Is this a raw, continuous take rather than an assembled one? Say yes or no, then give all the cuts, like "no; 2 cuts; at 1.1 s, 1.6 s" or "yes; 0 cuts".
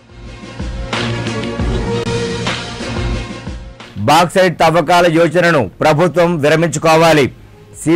no; 1 cut; at 2.0 s